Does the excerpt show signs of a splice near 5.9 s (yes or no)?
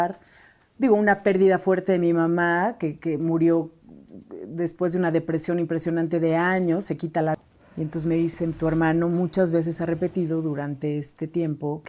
no